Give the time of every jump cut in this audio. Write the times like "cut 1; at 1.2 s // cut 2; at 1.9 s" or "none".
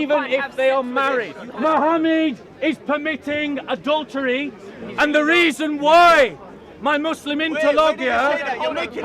cut 1; at 1.4 s